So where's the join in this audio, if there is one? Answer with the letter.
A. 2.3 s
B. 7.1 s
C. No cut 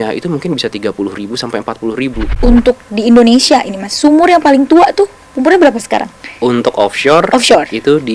A